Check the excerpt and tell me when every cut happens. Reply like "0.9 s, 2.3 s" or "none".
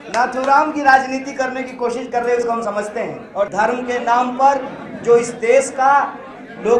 3.5 s

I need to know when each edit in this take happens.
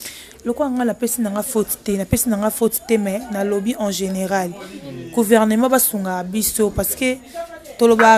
none

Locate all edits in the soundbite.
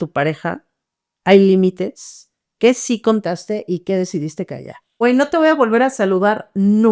5.0 s

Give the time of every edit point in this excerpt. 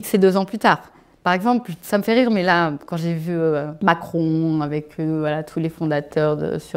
3.7 s

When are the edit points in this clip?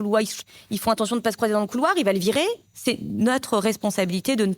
2.7 s

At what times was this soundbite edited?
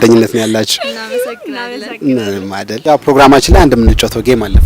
2.9 s

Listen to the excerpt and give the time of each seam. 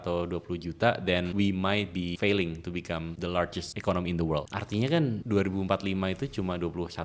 1.3 s, 2.1 s, 3.4 s, 4.6 s, 5.2 s

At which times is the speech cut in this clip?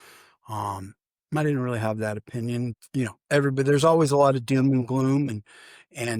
2.7 s

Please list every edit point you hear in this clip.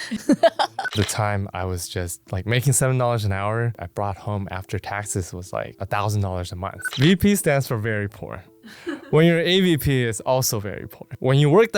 0.9 s, 3.7 s, 6.8 s

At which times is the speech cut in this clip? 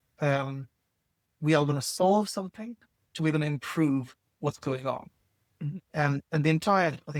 none

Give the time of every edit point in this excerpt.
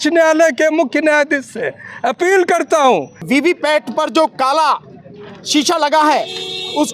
3.2 s

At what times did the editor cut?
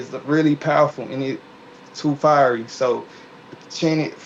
none

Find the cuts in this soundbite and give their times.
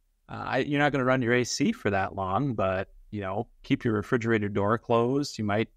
none

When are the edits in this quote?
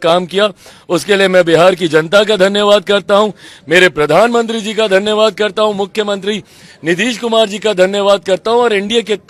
none

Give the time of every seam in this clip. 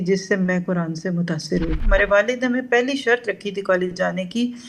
1.8 s

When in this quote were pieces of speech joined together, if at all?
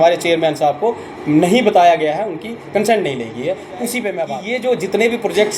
4.4 s

